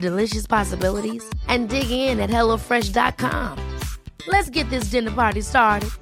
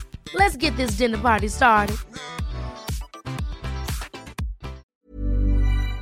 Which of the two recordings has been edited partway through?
second; 1 cut; at 5.0 s

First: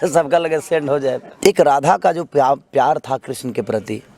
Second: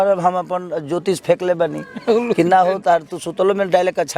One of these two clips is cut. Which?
first; 1 cut; at 1.3 s

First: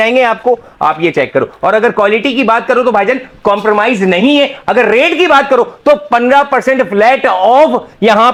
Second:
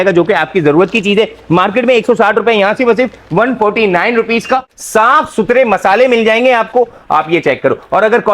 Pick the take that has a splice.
second; 1 cut; at 4.8 s

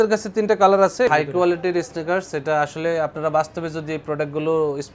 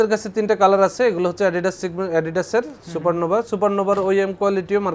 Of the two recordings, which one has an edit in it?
first; 1 cut; at 1.1 s

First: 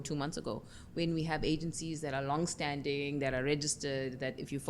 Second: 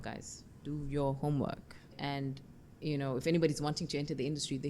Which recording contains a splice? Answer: second; 1 cut; at 1.9 s

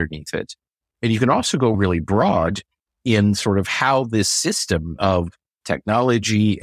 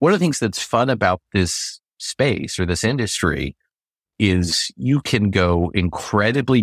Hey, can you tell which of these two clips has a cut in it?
first; 1 cut; at 1.8 s

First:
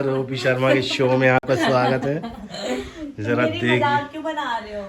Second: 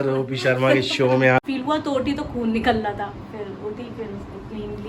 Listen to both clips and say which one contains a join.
second; 1 cut; at 1.4 s

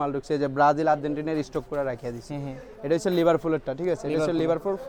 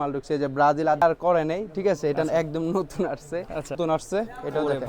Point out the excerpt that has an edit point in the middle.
second; 2 cuts; at 1.0 s, 3.7 s

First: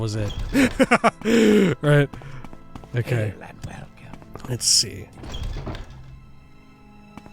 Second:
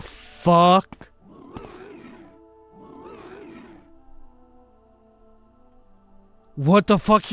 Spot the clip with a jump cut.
first; 1 cut; at 3.3 s

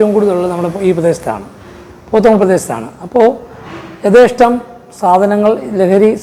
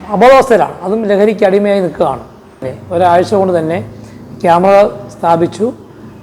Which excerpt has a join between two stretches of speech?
second; 1 cut; at 2.7 s

